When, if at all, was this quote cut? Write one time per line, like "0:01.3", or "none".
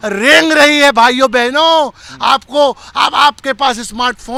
none